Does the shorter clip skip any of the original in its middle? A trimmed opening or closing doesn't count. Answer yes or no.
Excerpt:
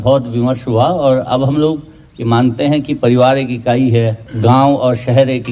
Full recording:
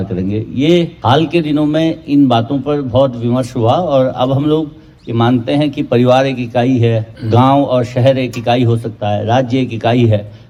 no